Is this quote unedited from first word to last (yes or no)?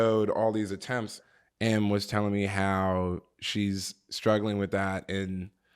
no